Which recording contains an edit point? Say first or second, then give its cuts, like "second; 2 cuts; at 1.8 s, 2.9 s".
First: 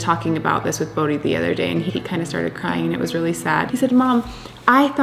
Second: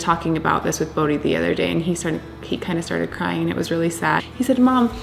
first; 2 cuts; at 1.9 s, 3.7 s